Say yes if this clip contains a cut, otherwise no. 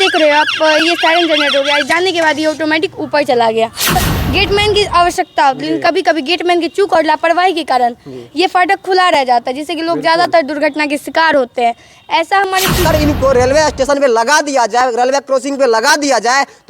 yes